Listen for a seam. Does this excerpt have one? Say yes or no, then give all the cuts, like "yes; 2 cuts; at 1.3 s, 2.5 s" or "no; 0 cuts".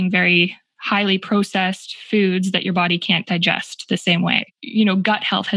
yes; 1 cut; at 4.6 s